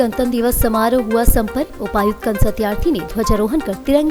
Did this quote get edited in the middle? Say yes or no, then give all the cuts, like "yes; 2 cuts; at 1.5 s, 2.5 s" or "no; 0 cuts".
no; 0 cuts